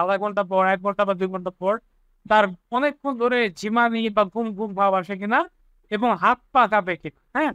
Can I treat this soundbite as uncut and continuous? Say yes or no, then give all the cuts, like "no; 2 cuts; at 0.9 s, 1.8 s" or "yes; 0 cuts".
yes; 0 cuts